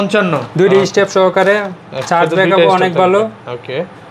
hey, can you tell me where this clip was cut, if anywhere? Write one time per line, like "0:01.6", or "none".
none